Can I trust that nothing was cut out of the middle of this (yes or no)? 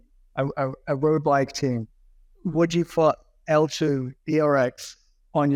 yes